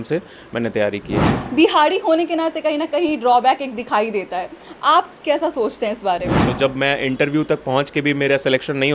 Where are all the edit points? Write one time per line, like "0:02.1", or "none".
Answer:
0:01.3
0:06.4